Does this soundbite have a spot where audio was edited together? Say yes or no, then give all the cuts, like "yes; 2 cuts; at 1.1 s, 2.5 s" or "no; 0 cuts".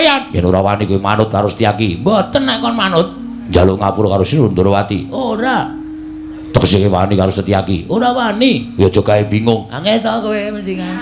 no; 0 cuts